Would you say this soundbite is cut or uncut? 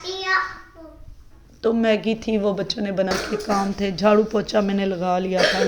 cut